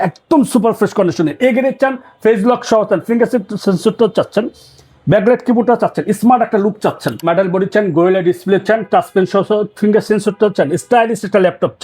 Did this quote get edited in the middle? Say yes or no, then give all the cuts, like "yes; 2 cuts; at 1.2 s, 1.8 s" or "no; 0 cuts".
yes; 1 cut; at 7.2 s